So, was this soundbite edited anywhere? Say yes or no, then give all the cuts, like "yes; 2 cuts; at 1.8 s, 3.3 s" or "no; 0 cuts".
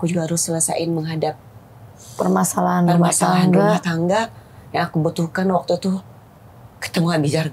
no; 0 cuts